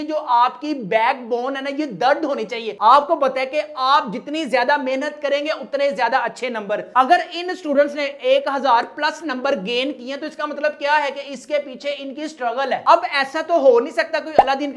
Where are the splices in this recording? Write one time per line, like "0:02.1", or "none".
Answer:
none